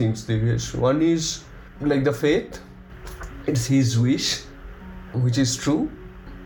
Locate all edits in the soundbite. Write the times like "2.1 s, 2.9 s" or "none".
2.9 s